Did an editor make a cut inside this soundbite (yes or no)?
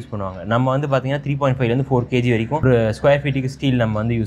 yes